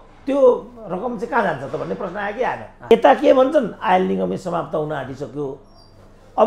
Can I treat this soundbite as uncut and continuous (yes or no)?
no